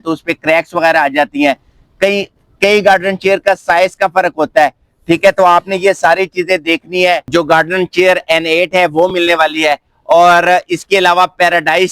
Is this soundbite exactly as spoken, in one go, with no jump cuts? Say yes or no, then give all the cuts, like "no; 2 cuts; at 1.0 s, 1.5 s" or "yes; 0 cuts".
no; 1 cut; at 7.2 s